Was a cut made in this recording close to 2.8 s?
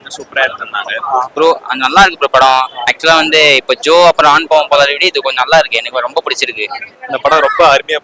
no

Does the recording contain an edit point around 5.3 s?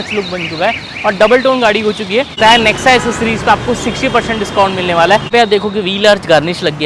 yes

